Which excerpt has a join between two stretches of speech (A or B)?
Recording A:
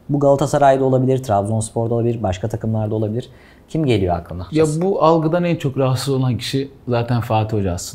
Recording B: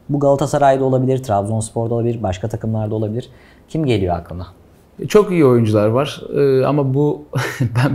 A